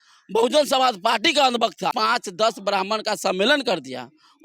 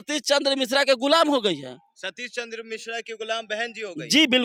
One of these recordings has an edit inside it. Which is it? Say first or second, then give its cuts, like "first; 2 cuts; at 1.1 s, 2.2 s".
first; 1 cut; at 1.9 s